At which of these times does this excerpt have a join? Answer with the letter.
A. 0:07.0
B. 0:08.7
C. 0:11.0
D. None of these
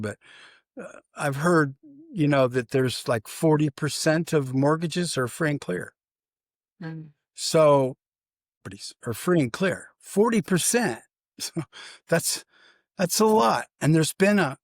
B